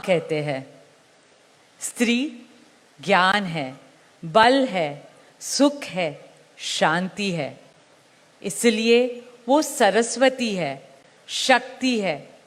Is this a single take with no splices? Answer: yes; 0 cuts

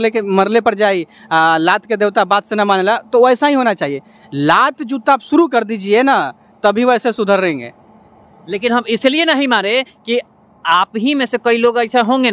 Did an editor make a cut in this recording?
no; 0 cuts

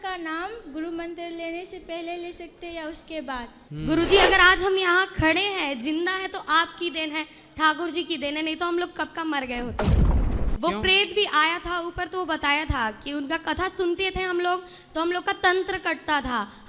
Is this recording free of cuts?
no; 1 cut; at 3.6 s

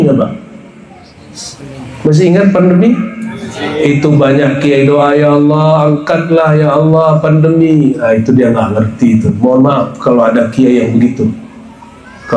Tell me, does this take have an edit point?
no; 0 cuts

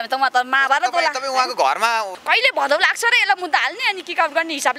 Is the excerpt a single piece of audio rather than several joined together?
no; 1 cut; at 2.1 s

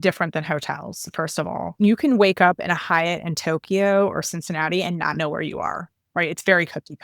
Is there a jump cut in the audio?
yes; 1 cut; at 1.7 s

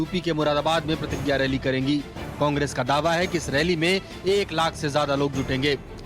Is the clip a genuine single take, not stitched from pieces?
no; 1 cut; at 4.1 s

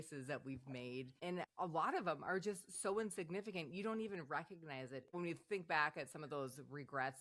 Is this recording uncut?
no; 2 cuts; at 1.2 s, 5.1 s

